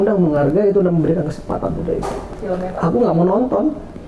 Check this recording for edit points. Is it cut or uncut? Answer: cut